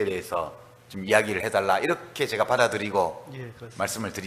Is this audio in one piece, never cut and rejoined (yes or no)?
no